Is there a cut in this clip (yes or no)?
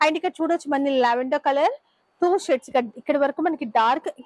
no